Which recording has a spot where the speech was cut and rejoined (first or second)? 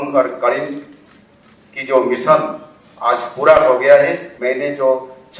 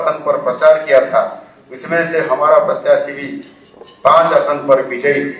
first